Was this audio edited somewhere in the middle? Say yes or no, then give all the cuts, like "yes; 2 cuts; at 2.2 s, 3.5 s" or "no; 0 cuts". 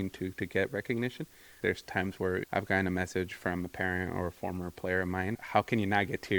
yes; 2 cuts; at 1.6 s, 5.4 s